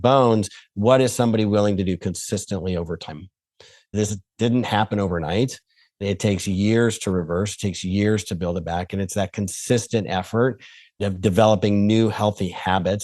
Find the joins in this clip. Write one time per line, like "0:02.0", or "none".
0:04.0
0:06.0
0:10.9

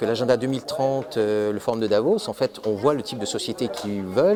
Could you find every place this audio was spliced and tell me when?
none

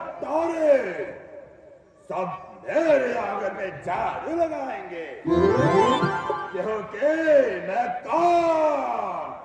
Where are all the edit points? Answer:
none

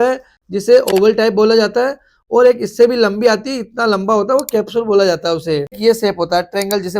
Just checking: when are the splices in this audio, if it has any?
0:05.8

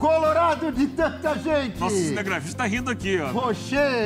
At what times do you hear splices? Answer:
none

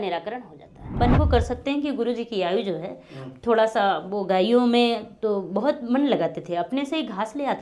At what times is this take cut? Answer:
0:01.0

